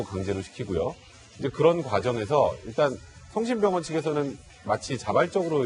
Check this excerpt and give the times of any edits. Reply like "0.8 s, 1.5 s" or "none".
none